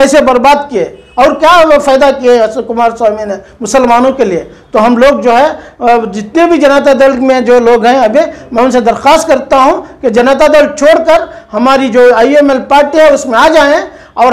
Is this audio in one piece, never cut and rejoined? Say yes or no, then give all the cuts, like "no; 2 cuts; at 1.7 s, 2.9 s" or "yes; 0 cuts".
yes; 0 cuts